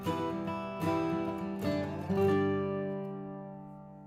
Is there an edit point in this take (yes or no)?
no